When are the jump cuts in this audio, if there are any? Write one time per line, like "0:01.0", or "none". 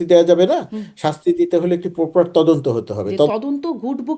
0:03.3